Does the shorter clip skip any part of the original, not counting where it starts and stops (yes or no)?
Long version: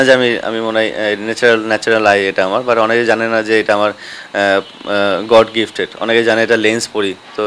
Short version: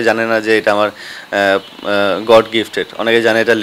no